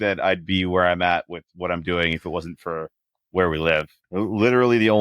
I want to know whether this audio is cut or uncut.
cut